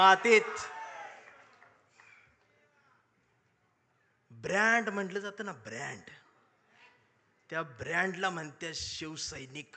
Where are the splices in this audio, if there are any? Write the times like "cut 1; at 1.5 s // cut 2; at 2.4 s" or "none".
none